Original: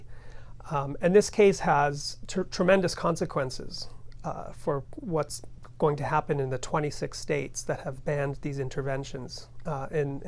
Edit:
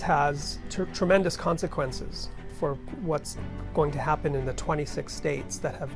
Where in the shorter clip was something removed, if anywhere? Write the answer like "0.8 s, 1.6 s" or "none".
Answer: 2.4 s